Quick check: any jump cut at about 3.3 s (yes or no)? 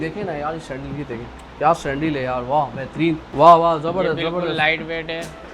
yes